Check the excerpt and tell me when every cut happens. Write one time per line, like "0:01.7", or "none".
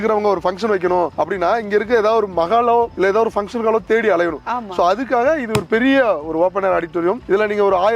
none